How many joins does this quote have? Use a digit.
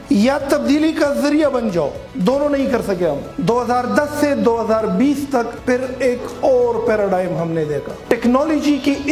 3